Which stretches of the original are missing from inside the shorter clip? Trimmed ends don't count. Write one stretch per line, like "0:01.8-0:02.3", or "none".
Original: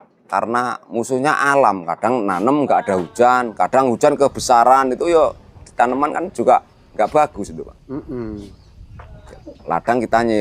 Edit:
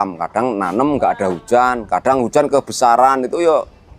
none